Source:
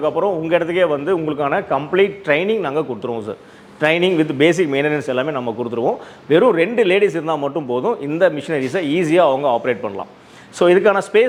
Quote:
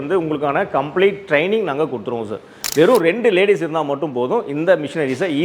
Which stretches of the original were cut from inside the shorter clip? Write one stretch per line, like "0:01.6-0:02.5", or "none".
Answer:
0:03.5-0:06.1